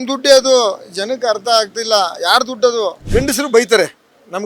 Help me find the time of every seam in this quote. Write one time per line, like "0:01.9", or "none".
0:03.0